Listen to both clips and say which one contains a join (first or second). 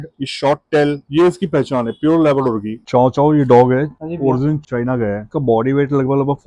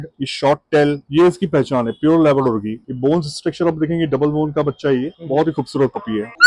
first